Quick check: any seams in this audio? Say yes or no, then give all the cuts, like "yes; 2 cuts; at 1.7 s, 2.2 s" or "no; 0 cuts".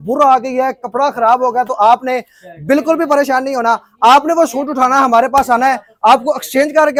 no; 0 cuts